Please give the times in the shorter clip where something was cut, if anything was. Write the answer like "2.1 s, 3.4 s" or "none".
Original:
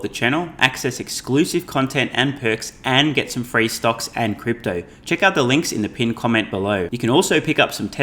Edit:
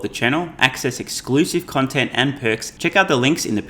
2.7 s